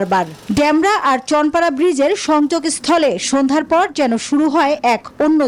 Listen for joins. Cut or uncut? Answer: uncut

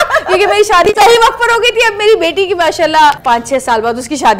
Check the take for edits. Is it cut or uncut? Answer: cut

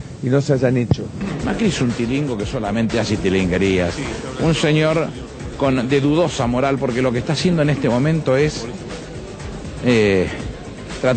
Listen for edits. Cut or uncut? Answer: uncut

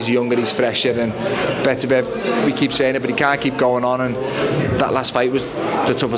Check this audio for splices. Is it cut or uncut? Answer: cut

